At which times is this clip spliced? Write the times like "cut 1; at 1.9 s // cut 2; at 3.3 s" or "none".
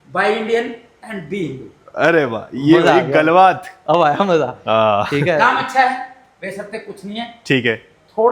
none

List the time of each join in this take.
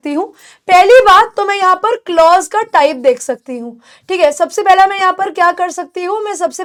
none

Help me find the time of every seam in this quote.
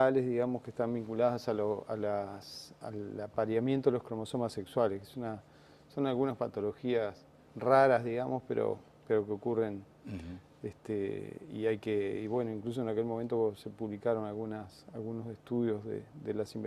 cut 1; at 12.4 s

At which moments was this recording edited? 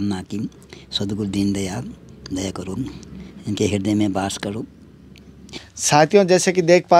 cut 1; at 5.6 s

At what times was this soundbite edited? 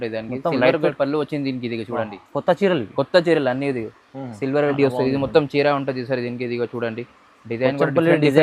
cut 1; at 4.8 s

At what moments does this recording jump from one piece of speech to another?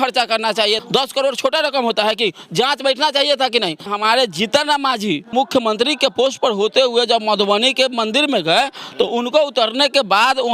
cut 1; at 0.8 s // cut 2; at 3.9 s // cut 3; at 5.3 s

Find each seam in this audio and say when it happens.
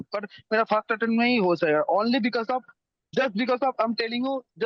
none

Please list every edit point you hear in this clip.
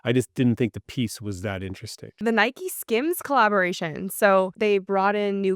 cut 1; at 2.2 s // cut 2; at 4.5 s

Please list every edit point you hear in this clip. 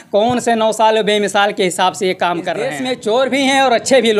cut 1; at 2.8 s

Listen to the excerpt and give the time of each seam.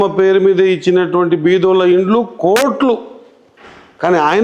none

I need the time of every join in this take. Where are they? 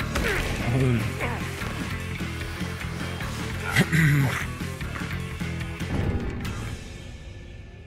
none

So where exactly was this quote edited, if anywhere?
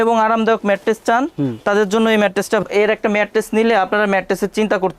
cut 1; at 2.6 s

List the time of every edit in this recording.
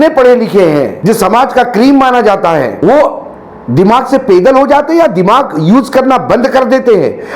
cut 1; at 0.9 s // cut 2; at 2.8 s

